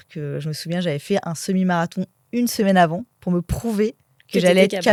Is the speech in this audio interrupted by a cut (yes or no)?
no